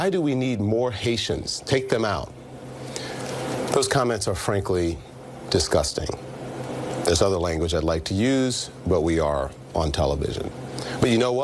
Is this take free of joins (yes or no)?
yes